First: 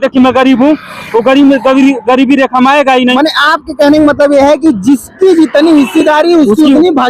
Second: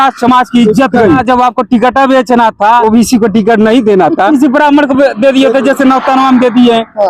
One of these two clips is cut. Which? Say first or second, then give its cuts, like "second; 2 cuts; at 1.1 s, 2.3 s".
second; 3 cuts; at 1.2 s, 2.8 s, 4.3 s